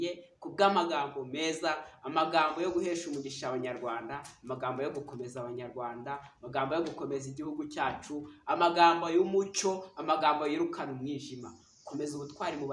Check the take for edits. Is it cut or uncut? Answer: uncut